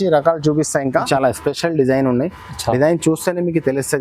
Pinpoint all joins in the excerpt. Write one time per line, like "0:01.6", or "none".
0:01.1

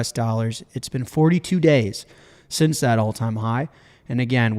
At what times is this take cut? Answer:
none

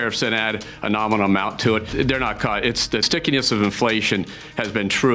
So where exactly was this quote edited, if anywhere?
0:01.9
0:03.1

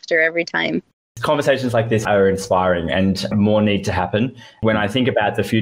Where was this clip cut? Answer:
0:01.0
0:02.0
0:04.6

